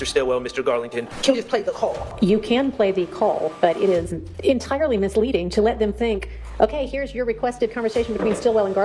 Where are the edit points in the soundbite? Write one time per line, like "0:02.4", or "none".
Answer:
0:01.1
0:02.1
0:04.2